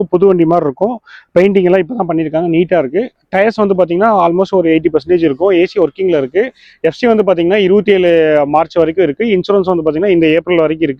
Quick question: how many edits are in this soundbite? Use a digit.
0